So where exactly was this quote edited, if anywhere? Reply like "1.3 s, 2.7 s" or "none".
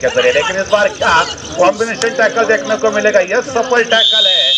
none